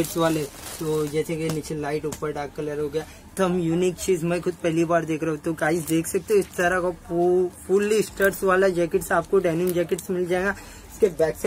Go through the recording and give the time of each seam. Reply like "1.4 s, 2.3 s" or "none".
3.3 s